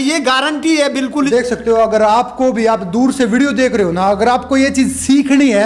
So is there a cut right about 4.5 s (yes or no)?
no